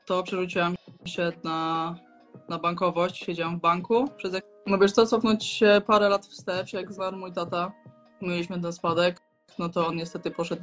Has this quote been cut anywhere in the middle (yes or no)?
yes